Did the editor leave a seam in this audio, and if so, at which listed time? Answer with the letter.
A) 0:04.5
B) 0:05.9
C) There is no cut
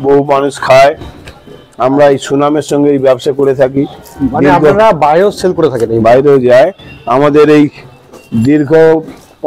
C